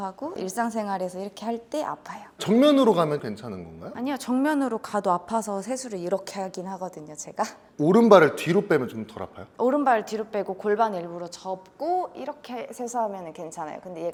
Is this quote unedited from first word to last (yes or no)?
yes